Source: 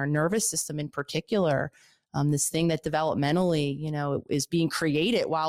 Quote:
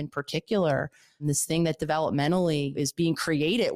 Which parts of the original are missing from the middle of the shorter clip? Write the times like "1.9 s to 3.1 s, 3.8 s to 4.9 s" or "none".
2.0 s to 2.3 s, 3.8 s to 4.3 s